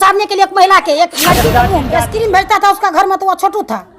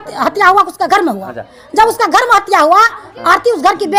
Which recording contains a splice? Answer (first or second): first